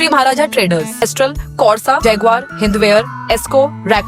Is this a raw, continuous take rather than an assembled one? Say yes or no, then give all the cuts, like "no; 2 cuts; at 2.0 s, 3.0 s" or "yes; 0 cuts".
no; 1 cut; at 1.0 s